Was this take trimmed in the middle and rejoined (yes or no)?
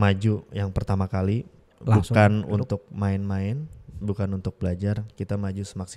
yes